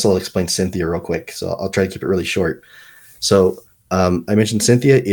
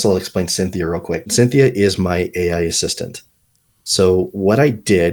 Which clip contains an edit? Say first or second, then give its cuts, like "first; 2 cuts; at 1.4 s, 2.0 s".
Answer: second; 1 cut; at 1.3 s